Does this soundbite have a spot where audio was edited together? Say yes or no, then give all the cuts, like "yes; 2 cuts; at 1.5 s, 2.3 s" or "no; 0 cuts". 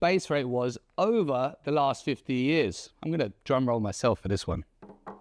no; 0 cuts